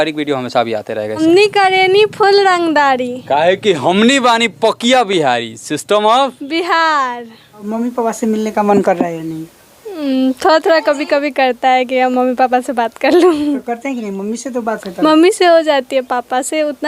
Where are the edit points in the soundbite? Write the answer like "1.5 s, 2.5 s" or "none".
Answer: 1.2 s, 7.6 s

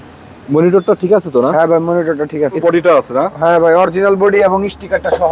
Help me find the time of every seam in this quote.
2.6 s

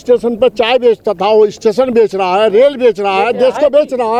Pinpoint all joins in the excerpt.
none

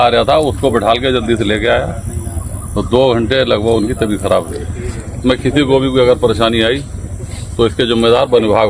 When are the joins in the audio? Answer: 5.2 s

